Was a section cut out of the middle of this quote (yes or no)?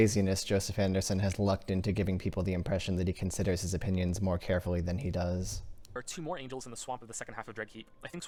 no